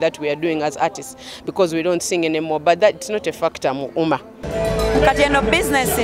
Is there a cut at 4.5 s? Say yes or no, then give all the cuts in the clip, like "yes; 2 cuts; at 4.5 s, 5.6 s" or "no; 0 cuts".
yes; 1 cut; at 4.5 s